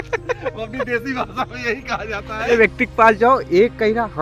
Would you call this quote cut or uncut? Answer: cut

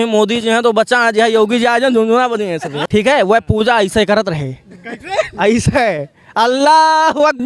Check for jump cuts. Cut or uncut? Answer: cut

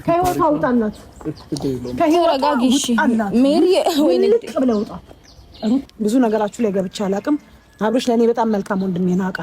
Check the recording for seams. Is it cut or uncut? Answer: cut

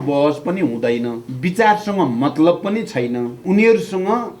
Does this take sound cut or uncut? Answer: cut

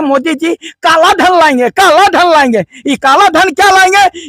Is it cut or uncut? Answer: uncut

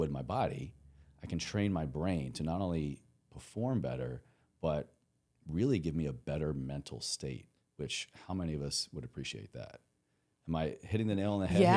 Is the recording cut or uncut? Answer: uncut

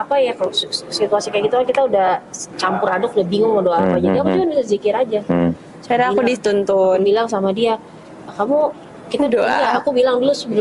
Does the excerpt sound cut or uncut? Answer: uncut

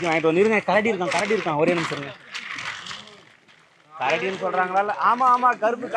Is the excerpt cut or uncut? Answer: uncut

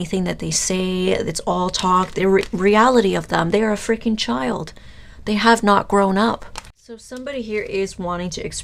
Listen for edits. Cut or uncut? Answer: cut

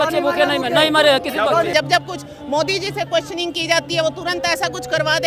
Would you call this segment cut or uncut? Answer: cut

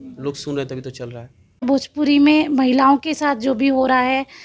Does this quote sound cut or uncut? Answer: cut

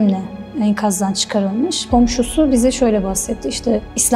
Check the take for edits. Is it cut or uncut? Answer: cut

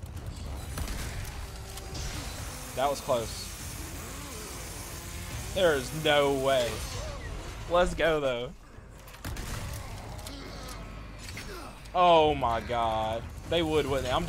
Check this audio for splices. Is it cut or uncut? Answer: uncut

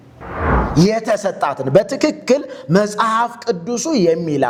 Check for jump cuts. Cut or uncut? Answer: uncut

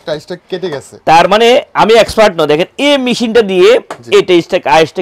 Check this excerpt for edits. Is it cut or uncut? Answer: uncut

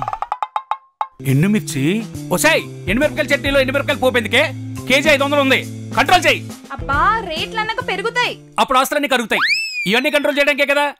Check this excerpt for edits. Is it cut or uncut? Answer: cut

